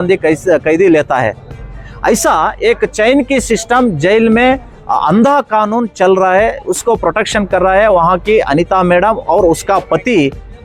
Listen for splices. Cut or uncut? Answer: uncut